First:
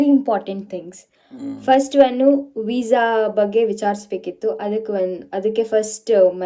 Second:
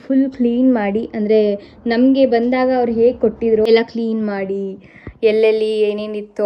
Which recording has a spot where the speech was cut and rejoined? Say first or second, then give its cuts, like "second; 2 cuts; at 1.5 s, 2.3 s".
second; 1 cut; at 3.7 s